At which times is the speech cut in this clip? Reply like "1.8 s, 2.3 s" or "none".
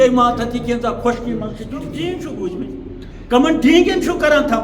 1.9 s